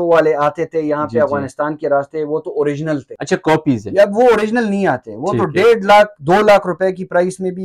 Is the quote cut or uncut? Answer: cut